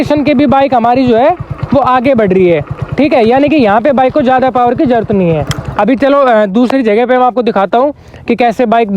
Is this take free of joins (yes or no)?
yes